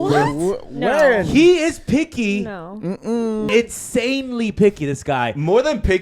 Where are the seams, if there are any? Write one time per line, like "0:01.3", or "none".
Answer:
0:03.5